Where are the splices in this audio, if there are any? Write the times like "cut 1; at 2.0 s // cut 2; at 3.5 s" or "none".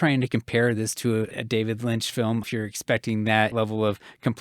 cut 1; at 1.3 s // cut 2; at 2.5 s // cut 3; at 3.5 s